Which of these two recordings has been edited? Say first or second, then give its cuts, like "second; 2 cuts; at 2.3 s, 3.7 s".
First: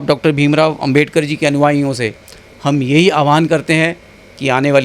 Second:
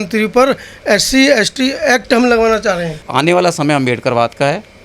second; 1 cut; at 3.0 s